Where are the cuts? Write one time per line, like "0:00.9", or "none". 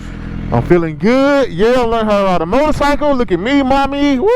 none